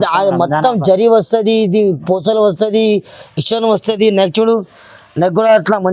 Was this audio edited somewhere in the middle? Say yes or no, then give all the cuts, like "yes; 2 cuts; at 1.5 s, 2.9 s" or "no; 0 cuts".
no; 0 cuts